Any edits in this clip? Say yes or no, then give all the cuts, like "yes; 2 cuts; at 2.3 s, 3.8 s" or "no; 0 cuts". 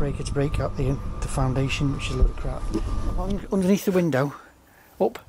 yes; 1 cut; at 3.3 s